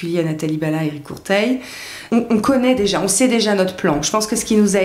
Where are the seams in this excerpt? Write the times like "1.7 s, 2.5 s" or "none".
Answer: 2.0 s